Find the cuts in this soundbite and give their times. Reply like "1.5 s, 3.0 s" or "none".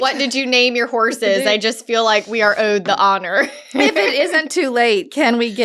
none